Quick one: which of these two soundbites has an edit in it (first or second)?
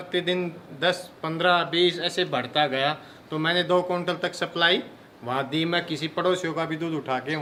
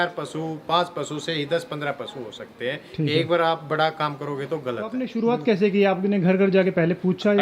second